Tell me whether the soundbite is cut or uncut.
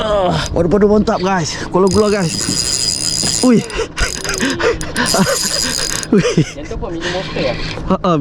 uncut